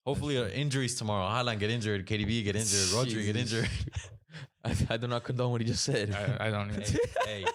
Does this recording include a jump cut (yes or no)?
no